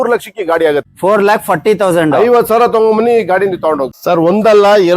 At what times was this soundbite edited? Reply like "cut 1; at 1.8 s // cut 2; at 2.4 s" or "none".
cut 1; at 0.9 s // cut 2; at 4.0 s